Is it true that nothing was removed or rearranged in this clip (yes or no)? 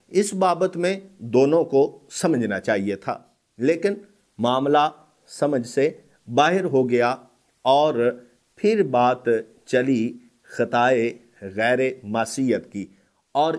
yes